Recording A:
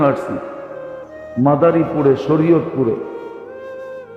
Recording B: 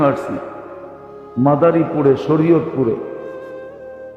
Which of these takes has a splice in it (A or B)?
B